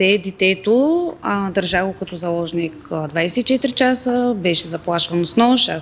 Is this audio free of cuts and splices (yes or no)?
yes